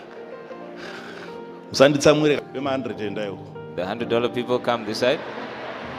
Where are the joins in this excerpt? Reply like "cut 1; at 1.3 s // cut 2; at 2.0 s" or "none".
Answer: cut 1; at 2.4 s